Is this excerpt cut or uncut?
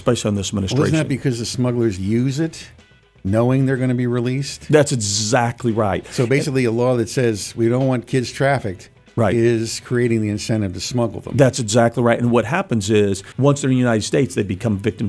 cut